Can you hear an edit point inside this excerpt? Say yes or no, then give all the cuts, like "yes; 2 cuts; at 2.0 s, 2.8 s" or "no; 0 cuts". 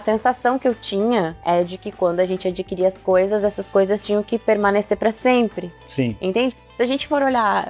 no; 0 cuts